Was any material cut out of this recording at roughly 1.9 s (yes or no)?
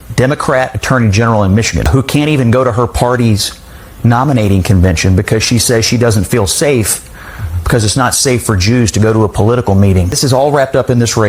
yes